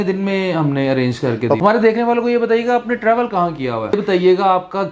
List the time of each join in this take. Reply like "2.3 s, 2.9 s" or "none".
1.6 s, 4.0 s